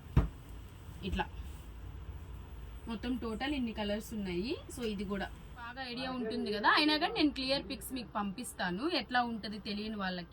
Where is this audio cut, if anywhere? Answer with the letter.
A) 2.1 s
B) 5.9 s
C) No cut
B